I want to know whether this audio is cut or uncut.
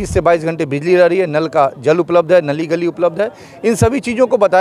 uncut